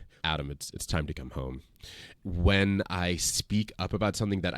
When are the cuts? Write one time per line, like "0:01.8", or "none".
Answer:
0:02.1